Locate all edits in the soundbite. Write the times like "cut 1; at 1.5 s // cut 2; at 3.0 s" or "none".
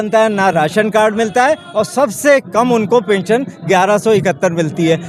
none

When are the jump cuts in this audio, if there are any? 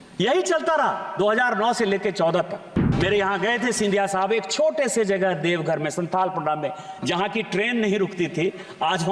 cut 1; at 2.9 s

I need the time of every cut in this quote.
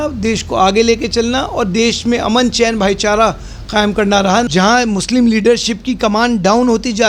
cut 1; at 4.5 s

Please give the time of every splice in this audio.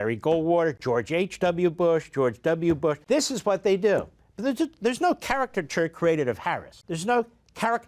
cut 1; at 3.0 s // cut 2; at 6.7 s

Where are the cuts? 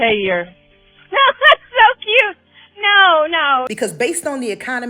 cut 1; at 3.7 s

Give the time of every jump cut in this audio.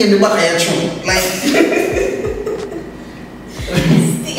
cut 1; at 1.7 s

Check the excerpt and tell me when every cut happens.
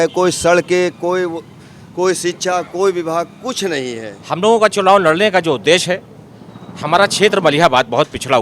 cut 1; at 4.1 s

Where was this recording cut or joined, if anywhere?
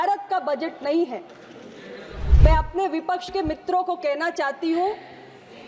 cut 1; at 2.2 s

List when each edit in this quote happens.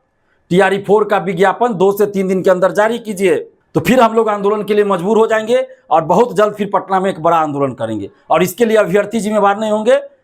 cut 1; at 3.6 s

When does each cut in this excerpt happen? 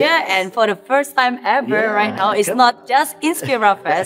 none

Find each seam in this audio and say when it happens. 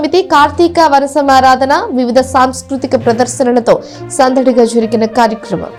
none

